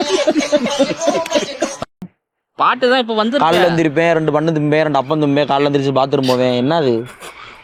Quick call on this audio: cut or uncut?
uncut